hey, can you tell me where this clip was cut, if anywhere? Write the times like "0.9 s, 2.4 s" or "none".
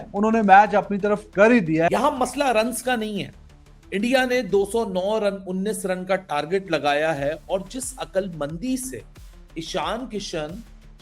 1.9 s